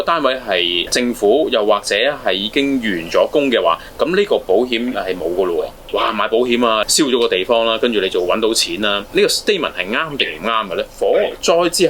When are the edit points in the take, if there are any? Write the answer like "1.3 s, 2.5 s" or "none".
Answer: 0.9 s, 5.8 s, 6.9 s, 10.9 s